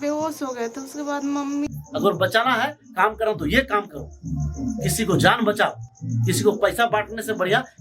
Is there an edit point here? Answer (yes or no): yes